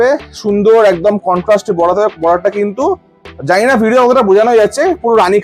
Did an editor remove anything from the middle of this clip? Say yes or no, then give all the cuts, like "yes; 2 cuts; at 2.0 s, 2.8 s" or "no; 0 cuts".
no; 0 cuts